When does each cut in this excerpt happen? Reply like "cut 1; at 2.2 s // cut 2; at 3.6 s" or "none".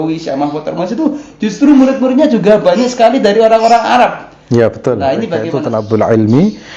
cut 1; at 5.4 s